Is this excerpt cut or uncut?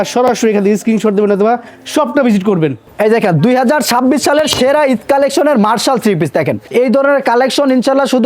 cut